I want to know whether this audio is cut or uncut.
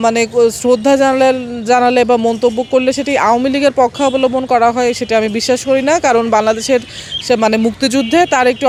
uncut